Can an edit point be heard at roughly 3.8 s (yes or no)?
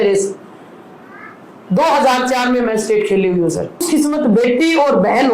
yes